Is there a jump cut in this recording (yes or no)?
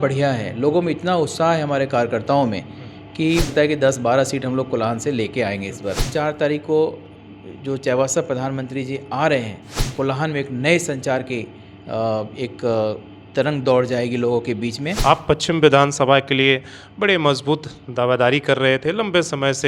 yes